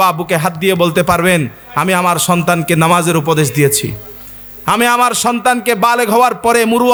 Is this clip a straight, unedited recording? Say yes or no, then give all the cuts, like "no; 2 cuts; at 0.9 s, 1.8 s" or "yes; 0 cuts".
yes; 0 cuts